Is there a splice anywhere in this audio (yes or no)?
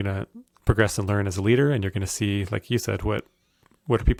no